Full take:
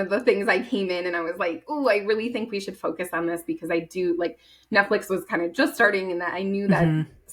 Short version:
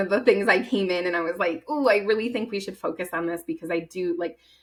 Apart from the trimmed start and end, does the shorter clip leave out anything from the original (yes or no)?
no